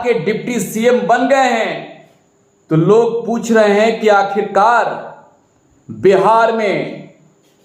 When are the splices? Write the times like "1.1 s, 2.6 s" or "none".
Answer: none